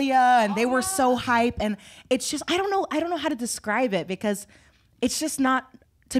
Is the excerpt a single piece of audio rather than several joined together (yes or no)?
yes